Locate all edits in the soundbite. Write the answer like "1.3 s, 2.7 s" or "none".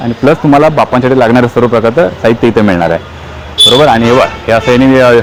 none